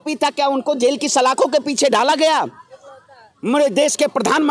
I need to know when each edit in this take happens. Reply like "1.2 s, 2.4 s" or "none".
none